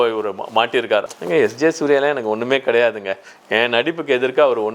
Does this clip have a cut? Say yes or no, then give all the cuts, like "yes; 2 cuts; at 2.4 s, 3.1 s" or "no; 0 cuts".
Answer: yes; 1 cut; at 1.1 s